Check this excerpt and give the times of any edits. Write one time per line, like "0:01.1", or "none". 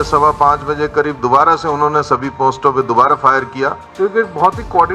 0:03.8